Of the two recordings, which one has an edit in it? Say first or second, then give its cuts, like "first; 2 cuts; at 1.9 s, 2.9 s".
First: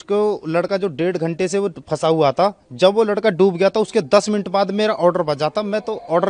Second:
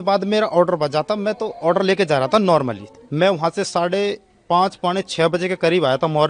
second; 1 cut; at 3.0 s